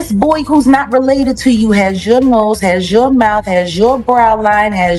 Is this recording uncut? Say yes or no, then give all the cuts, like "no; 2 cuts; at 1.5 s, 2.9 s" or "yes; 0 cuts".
yes; 0 cuts